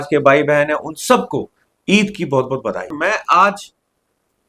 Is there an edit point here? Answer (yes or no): yes